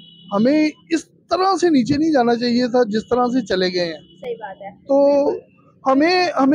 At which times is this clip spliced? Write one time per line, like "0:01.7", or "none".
none